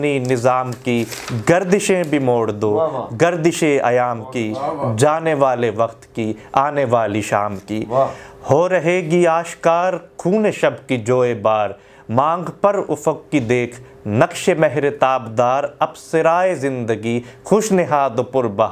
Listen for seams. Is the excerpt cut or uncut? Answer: uncut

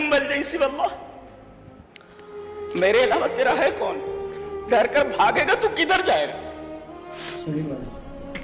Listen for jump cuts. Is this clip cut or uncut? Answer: uncut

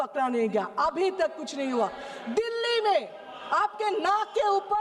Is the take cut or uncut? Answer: uncut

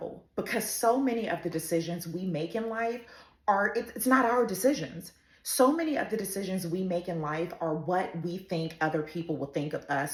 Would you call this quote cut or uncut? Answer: uncut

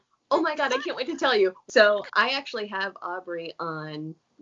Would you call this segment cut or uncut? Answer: cut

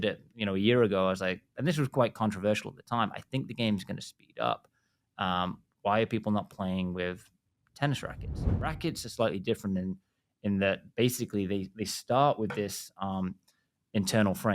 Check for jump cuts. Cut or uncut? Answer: cut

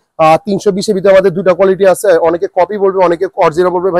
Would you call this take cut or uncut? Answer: uncut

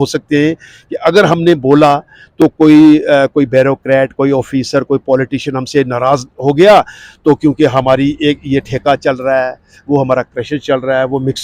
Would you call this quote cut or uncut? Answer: uncut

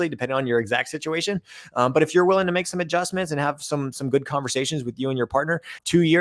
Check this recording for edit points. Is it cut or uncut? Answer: uncut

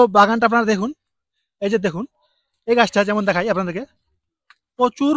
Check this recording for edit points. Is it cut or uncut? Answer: uncut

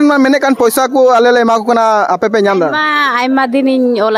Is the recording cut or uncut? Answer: uncut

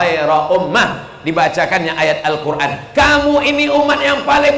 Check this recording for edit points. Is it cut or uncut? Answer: uncut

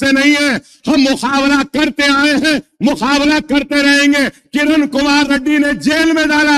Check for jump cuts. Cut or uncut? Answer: uncut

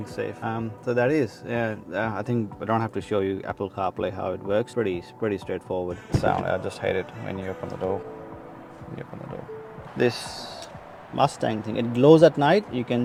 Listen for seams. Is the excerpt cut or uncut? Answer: uncut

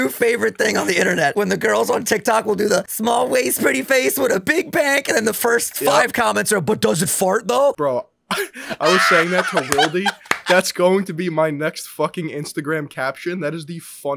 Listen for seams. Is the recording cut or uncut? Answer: cut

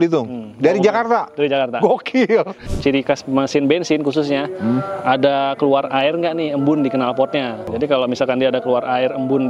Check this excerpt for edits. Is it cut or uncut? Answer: cut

